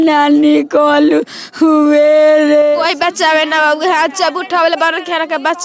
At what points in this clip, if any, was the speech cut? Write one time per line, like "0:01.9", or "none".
0:02.6